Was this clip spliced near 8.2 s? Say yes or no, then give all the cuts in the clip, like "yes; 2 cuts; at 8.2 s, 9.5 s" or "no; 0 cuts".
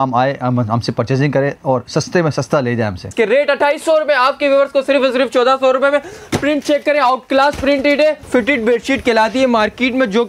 yes; 2 cuts; at 3.1 s, 8.2 s